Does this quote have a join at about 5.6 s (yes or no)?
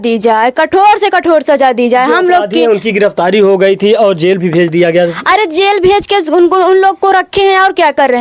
no